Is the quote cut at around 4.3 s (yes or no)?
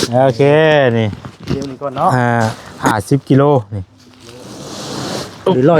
no